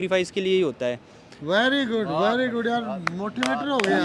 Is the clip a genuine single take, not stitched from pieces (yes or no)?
yes